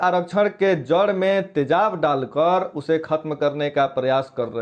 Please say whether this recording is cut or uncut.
uncut